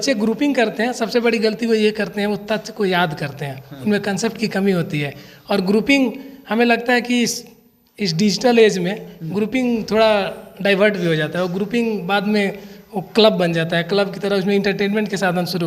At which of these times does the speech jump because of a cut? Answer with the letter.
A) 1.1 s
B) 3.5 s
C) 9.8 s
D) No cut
D